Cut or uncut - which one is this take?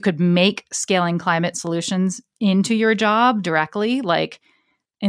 uncut